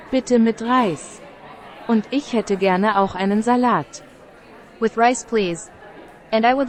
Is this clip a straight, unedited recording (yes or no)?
yes